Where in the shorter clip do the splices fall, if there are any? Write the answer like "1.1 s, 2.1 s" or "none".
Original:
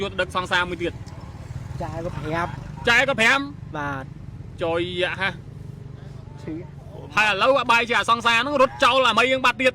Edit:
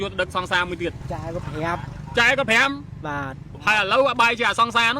1.0 s, 3.4 s